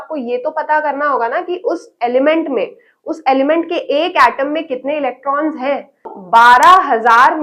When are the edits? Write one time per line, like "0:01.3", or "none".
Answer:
0:06.2